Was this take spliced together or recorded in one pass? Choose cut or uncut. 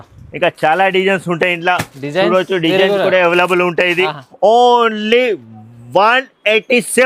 uncut